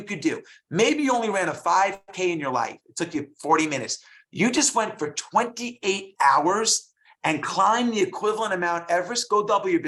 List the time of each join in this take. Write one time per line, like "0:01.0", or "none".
none